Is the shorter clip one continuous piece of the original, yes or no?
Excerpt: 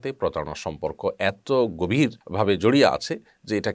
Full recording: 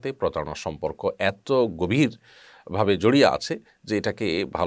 no